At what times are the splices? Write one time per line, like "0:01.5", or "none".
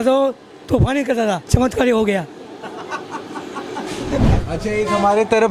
0:01.4
0:04.3